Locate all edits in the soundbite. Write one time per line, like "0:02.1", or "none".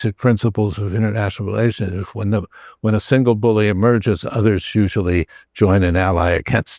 none